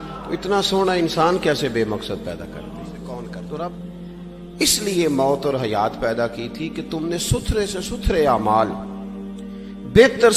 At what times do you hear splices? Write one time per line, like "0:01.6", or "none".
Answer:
0:04.0

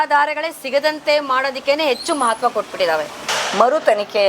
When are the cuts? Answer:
0:03.2

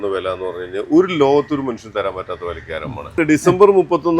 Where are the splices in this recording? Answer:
0:03.2

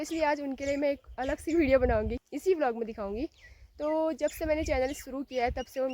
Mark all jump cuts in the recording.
0:02.2

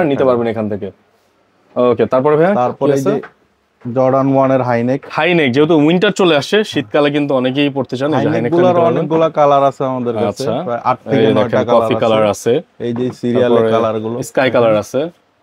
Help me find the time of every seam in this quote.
none

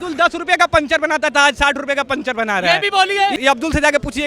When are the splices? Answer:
0:03.4

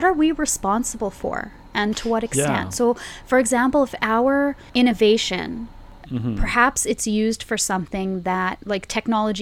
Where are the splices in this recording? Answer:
0:04.6
0:06.0

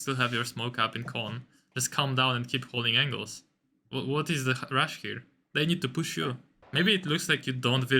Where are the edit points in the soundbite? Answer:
0:06.5

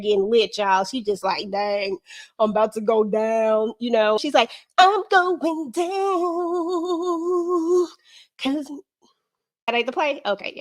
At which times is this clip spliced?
0:04.2
0:09.7

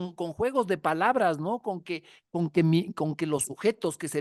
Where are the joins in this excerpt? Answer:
none

